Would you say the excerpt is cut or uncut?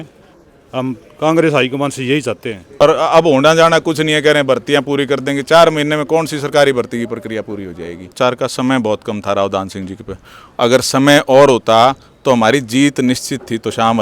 cut